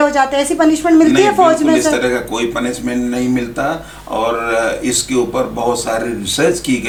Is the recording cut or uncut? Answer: uncut